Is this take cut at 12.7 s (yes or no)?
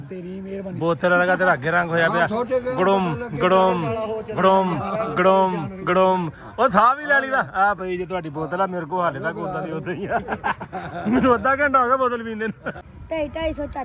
yes